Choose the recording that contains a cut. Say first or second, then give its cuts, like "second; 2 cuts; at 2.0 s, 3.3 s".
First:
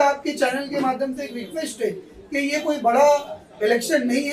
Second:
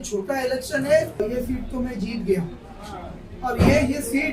second; 1 cut; at 1.2 s